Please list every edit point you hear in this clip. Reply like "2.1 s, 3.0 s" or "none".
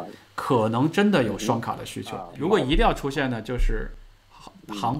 2.3 s